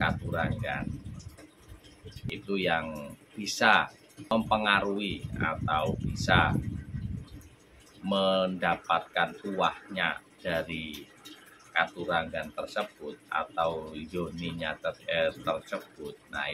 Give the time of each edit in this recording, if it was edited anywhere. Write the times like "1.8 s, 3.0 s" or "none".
2.3 s, 4.3 s